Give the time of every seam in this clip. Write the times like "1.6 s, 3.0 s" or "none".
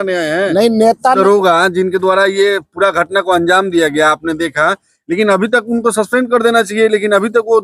1.2 s